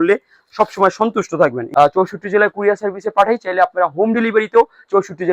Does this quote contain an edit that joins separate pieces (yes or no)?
yes